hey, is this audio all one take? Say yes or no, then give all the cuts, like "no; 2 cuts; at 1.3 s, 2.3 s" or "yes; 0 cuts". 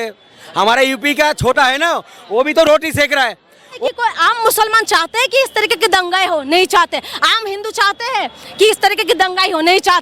no; 1 cut; at 3.8 s